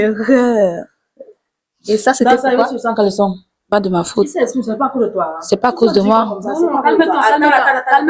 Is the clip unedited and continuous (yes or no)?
no